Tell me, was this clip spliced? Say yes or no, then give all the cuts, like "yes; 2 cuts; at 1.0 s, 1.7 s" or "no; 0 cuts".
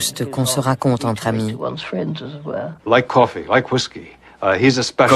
no; 0 cuts